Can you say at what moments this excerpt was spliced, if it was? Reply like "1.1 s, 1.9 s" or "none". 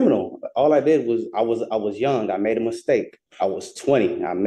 3.2 s